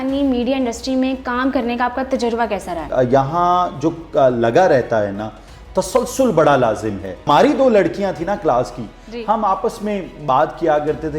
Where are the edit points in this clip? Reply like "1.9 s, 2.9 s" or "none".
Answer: 2.9 s, 7.3 s